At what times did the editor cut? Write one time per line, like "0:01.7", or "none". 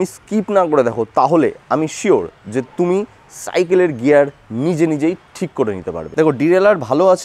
0:06.0